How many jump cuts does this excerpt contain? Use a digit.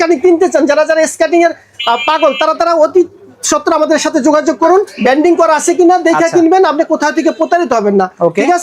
1